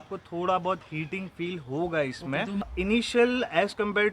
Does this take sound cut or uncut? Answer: cut